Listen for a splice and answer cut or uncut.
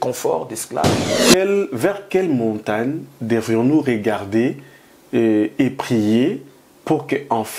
cut